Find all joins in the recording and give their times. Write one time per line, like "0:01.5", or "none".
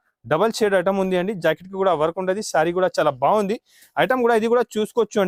none

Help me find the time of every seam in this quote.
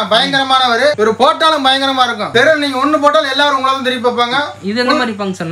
none

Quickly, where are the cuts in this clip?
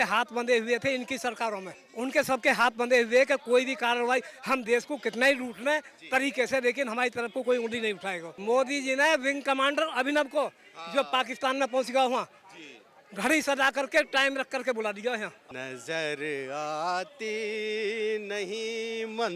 0:01.8
0:08.2
0:15.4

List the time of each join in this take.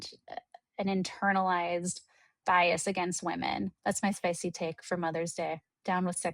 0:03.8

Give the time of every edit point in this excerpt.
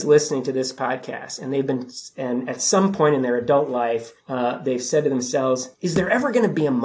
0:04.2
0:05.7

